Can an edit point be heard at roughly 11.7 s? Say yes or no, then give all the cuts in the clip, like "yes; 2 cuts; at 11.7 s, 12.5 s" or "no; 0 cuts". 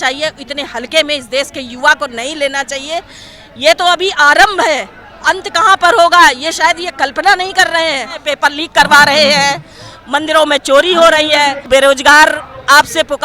yes; 2 cuts; at 8.3 s, 11.7 s